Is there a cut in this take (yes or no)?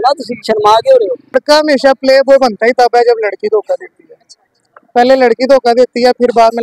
yes